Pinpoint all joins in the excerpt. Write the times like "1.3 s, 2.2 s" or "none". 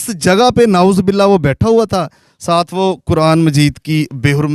none